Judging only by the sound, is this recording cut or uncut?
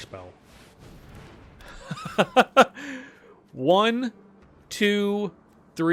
uncut